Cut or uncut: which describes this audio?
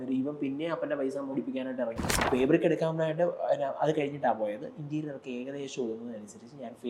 cut